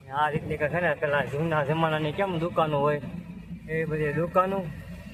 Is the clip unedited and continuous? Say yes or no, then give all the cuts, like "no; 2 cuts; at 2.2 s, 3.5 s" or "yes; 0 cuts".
yes; 0 cuts